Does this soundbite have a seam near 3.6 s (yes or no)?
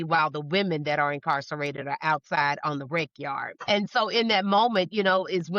yes